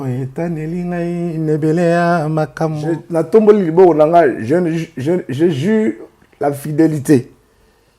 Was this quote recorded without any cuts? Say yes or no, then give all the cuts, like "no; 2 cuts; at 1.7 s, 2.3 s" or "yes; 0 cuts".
no; 1 cut; at 3.0 s